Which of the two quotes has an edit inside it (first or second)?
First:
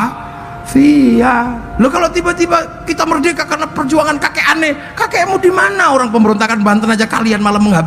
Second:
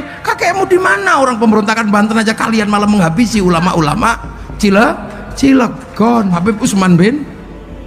second